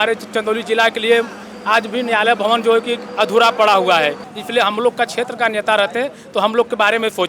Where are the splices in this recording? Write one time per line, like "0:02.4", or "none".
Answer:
0:04.3